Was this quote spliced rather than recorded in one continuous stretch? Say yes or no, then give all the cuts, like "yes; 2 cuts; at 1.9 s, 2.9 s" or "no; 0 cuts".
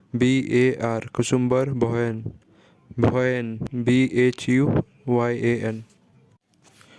yes; 1 cut; at 3.7 s